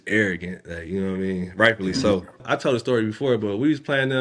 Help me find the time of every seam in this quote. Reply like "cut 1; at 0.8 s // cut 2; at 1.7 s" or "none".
cut 1; at 2.4 s